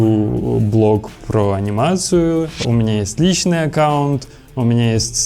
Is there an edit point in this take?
yes; 1 cut; at 2.6 s

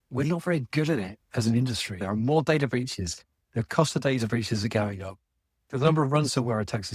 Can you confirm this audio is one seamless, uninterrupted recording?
no; 2 cuts; at 2.0 s, 5.6 s

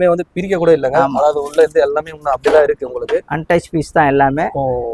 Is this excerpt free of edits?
yes; 0 cuts

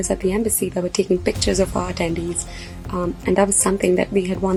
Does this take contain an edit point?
no; 0 cuts

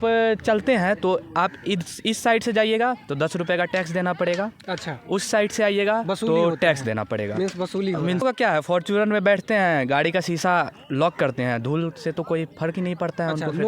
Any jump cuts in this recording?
yes; 1 cut; at 8.2 s

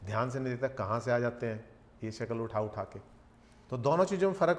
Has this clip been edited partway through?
no; 0 cuts

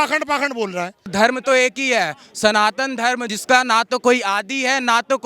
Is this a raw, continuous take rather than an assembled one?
no; 2 cuts; at 1.1 s, 3.2 s

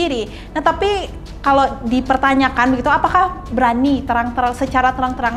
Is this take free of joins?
yes; 0 cuts

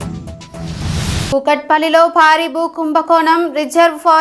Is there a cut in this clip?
no; 0 cuts

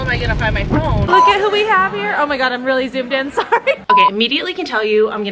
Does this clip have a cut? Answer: yes; 2 cuts; at 1.1 s, 3.8 s

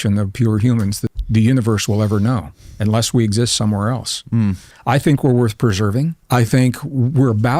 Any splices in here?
yes; 3 cuts; at 1.1 s, 4.7 s, 6.2 s

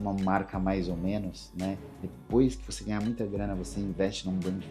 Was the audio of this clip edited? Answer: no; 0 cuts

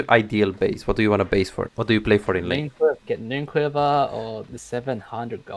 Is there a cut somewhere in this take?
yes; 3 cuts; at 1.7 s, 3.0 s, 4.6 s

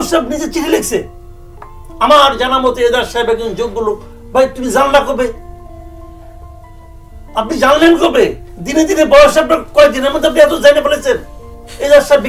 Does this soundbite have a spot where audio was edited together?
no; 0 cuts

